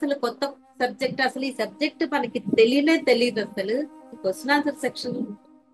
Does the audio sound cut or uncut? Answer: cut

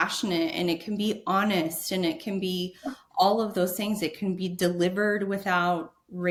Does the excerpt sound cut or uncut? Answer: uncut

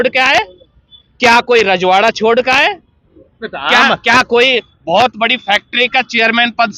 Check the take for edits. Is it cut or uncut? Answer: uncut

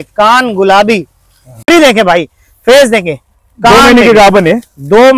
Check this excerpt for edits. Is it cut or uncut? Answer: cut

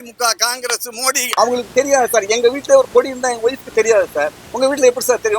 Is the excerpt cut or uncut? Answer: cut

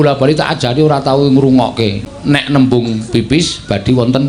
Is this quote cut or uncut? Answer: cut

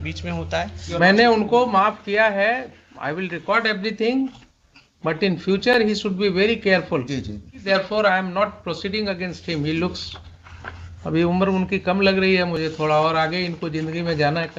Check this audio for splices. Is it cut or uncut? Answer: cut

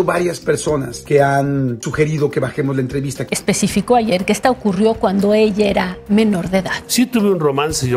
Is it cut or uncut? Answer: cut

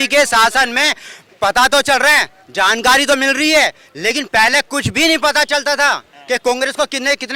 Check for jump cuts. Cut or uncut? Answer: uncut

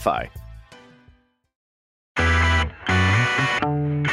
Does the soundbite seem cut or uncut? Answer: cut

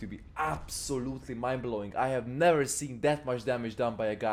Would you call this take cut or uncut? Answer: uncut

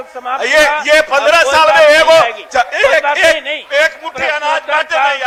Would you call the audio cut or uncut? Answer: uncut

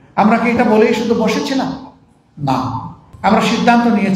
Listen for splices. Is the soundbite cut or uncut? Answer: cut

